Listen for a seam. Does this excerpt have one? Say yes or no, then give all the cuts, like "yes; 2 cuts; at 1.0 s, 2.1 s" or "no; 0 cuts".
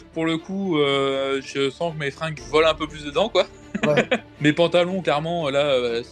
yes; 2 cuts; at 2.3 s, 4.3 s